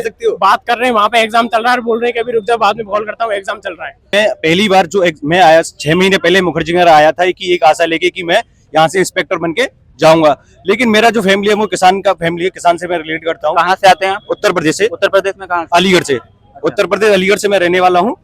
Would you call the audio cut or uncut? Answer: cut